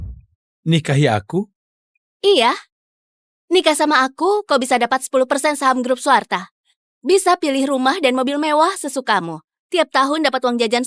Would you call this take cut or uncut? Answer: uncut